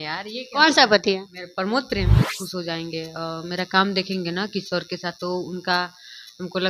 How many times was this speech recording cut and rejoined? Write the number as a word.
one